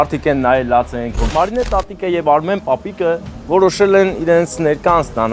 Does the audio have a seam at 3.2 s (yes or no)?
no